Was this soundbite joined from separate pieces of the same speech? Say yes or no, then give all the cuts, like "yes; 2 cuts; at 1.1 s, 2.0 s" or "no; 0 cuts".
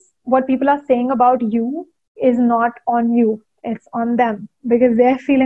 no; 0 cuts